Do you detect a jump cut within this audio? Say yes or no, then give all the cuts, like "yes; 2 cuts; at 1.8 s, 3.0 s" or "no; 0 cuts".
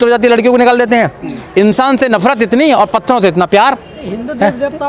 no; 0 cuts